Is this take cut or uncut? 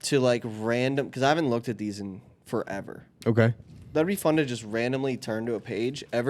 uncut